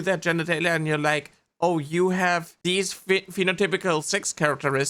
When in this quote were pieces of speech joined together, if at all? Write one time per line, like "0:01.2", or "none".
none